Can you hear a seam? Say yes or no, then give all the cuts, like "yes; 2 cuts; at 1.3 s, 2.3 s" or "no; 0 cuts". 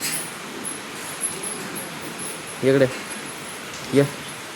no; 0 cuts